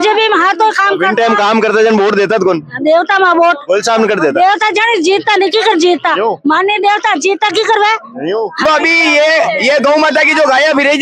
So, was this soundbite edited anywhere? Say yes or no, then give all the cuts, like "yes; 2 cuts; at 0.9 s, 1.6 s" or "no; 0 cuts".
yes; 1 cut; at 8.7 s